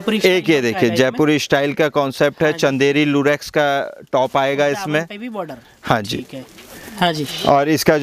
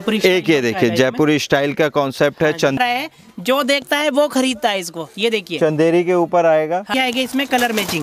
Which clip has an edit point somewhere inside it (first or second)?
second